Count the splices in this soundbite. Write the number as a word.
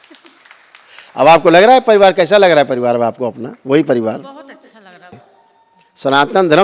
one